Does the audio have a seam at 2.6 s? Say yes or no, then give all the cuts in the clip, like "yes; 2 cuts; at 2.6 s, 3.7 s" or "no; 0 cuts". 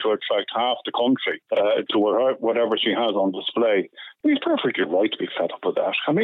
no; 2 cuts; at 1.3 s, 4.0 s